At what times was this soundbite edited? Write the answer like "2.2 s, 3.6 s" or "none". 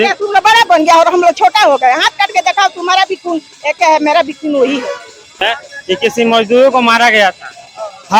5.4 s